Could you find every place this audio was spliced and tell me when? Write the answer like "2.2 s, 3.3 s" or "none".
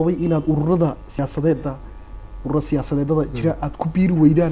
1.2 s